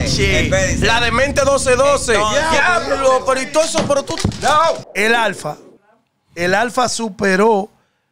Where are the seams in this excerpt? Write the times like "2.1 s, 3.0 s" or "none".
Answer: 4.8 s